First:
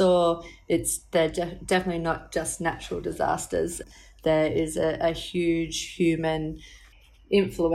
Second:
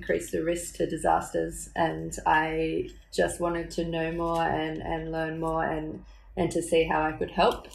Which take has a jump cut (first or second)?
first